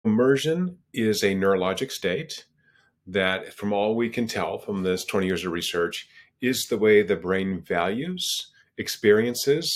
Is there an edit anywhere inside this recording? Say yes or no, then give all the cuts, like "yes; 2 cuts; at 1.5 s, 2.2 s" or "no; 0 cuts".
no; 0 cuts